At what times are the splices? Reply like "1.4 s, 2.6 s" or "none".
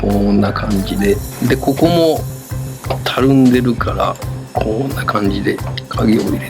1.3 s